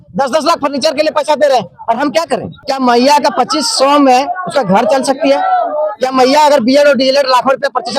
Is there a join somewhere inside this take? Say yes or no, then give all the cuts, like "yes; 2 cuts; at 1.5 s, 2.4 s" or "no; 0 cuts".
yes; 1 cut; at 2.6 s